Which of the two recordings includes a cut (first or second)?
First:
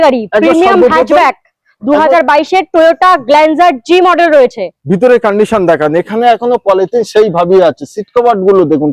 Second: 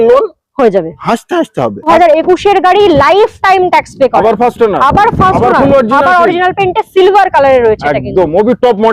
second